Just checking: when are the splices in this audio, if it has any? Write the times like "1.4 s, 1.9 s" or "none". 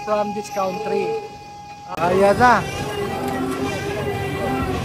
1.8 s

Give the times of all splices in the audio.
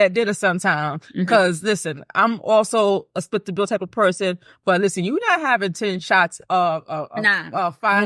none

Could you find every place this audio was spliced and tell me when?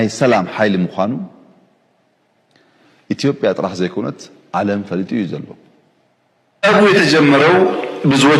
6.6 s

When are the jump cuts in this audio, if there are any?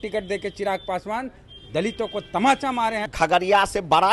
3.1 s

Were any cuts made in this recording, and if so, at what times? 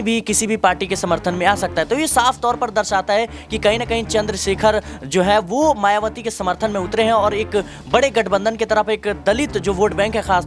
none

